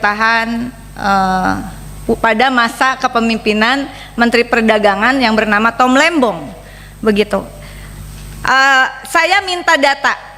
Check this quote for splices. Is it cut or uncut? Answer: uncut